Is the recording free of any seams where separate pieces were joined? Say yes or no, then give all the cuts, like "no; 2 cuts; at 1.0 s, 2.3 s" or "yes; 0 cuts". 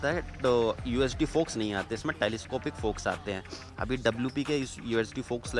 yes; 0 cuts